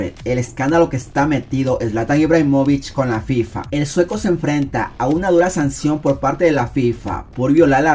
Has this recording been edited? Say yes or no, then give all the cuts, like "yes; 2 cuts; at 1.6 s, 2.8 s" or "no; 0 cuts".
no; 0 cuts